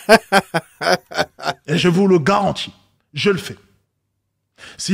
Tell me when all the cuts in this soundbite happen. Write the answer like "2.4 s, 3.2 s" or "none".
1.6 s